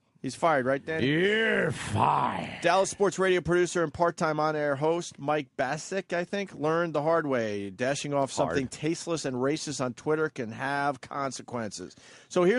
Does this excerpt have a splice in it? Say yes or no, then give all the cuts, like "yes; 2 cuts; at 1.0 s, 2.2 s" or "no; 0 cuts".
yes; 1 cut; at 9.5 s